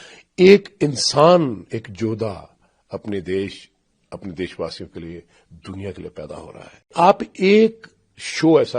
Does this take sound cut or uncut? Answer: cut